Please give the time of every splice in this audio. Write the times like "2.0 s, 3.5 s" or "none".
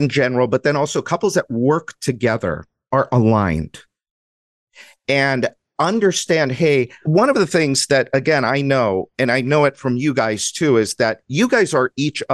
none